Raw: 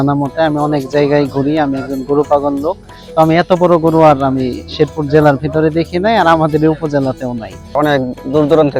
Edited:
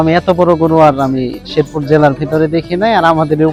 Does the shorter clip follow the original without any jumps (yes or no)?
yes